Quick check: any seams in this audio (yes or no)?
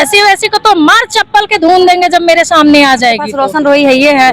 yes